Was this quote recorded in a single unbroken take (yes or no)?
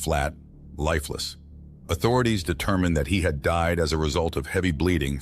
yes